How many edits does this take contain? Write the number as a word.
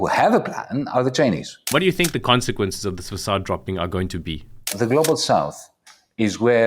two